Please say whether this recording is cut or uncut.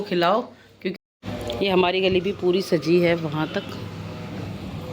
cut